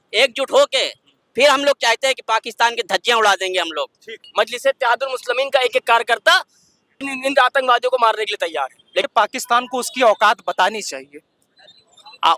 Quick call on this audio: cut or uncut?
cut